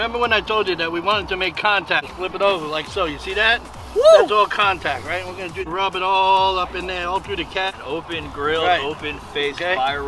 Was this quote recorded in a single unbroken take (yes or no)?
no